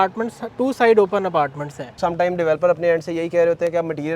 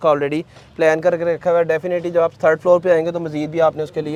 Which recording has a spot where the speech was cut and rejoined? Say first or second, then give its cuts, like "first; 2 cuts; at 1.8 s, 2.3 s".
first; 1 cut; at 1.9 s